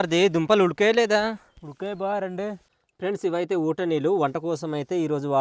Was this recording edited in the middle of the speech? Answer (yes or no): no